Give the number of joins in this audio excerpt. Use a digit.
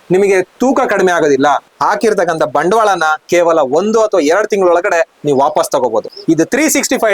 2